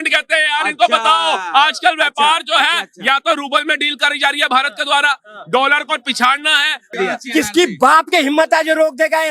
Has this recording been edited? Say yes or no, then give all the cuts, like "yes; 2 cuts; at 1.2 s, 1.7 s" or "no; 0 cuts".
yes; 1 cut; at 6.9 s